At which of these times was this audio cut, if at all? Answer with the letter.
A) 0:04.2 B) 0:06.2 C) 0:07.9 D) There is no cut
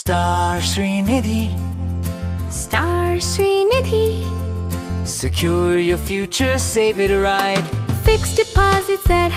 D